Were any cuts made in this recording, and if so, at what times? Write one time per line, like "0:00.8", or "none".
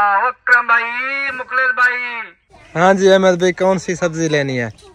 0:02.5